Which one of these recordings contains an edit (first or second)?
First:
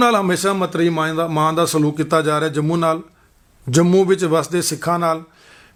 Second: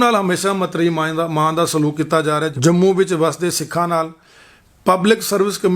second